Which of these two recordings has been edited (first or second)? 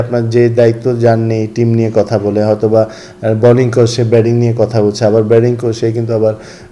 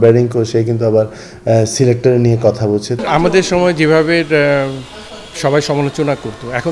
second